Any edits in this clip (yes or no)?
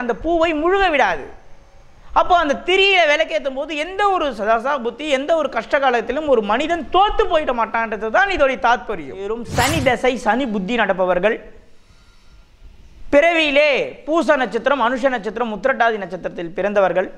yes